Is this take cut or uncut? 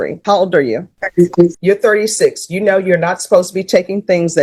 uncut